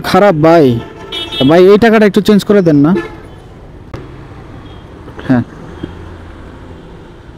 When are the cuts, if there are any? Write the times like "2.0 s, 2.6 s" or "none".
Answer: 3.9 s